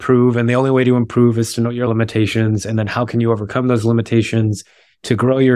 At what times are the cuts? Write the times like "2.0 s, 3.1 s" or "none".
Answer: 1.9 s

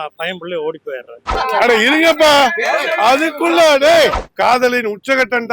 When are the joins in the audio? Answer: 1.3 s, 4.2 s

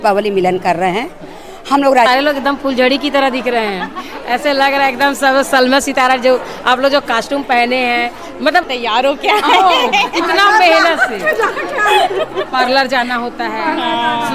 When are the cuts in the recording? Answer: 2.1 s, 8.6 s

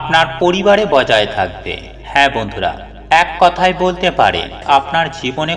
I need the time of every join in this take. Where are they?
4.6 s

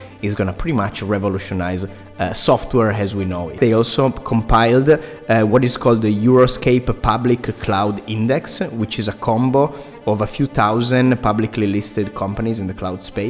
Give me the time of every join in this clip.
3.6 s

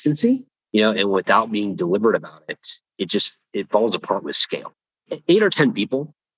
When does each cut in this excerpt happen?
none

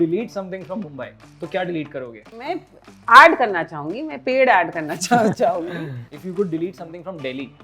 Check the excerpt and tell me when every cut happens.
2.4 s, 6.1 s

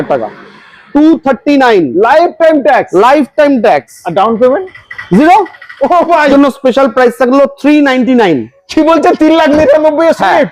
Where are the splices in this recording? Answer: 6.3 s

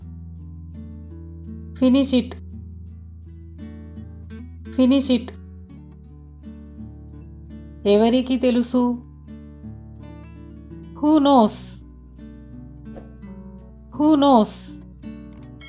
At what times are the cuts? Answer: 2.4 s, 4.1 s, 5.4 s, 7.2 s, 11.5 s, 13.5 s, 14.7 s

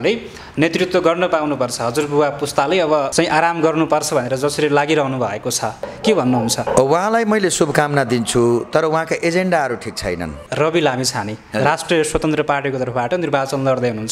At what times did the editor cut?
3.1 s, 5.9 s, 6.7 s, 10.4 s

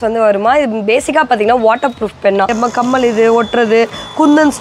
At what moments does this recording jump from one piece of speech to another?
2.5 s

